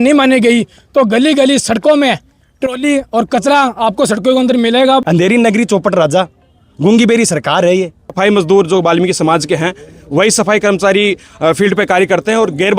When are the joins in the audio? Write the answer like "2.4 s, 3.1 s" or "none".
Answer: 5.0 s, 8.1 s